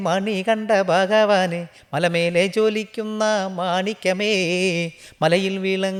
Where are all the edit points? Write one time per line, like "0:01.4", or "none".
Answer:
none